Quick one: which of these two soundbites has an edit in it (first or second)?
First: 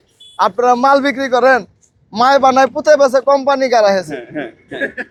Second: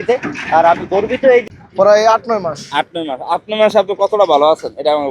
second